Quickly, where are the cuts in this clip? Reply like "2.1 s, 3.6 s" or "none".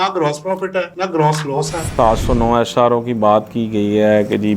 1.9 s